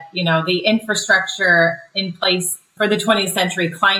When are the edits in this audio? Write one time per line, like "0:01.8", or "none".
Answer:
0:02.7